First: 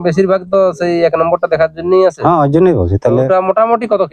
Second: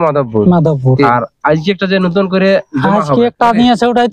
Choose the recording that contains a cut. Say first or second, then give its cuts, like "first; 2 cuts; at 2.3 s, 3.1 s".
second; 1 cut; at 1.1 s